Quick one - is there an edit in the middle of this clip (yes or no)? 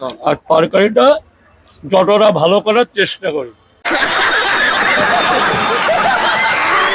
yes